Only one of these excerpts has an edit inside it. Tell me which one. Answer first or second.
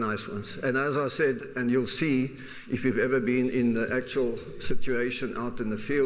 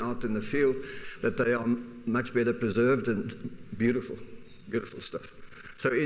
first